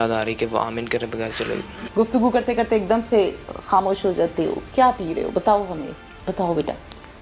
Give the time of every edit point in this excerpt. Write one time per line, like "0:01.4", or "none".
none

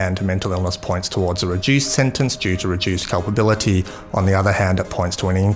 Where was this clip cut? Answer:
none

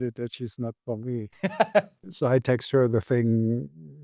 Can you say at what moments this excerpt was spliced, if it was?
0:02.1

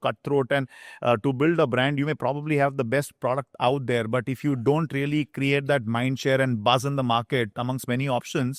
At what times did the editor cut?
none

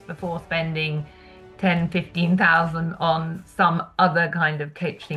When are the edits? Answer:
none

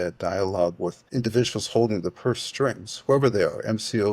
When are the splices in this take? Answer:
0:01.0

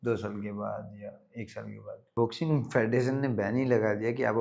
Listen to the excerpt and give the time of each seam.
0:02.1

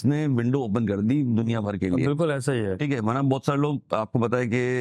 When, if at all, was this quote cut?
none

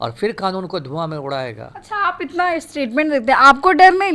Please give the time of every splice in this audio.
none

